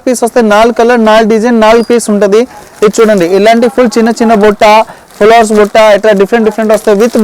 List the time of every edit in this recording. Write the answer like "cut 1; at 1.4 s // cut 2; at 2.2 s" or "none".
none